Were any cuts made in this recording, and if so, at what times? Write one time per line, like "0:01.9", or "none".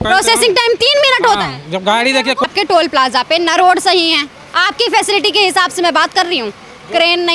0:02.4